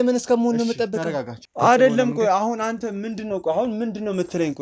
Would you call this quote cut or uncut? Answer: cut